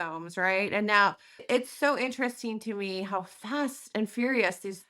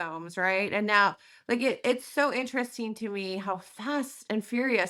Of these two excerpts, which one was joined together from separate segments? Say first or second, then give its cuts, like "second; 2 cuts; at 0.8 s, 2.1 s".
first; 1 cut; at 1.4 s